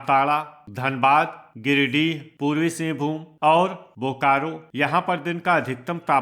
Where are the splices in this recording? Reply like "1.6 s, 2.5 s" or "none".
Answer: 2.3 s, 3.3 s, 4.6 s